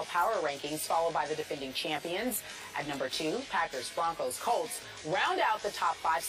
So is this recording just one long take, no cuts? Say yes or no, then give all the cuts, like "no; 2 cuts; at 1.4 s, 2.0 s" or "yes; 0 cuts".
no; 1 cut; at 3.8 s